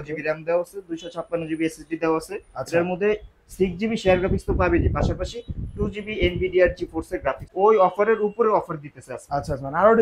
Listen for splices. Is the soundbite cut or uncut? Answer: cut